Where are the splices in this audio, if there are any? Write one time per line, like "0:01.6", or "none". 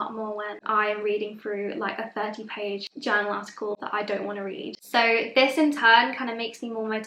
0:02.9
0:04.8